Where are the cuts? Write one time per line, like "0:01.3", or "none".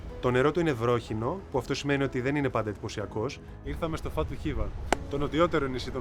0:03.5